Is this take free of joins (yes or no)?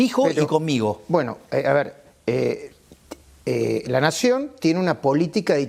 yes